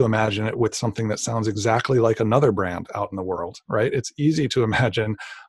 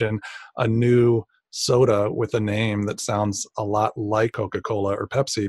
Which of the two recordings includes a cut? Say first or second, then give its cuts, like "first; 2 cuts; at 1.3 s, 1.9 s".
second; 1 cut; at 4.3 s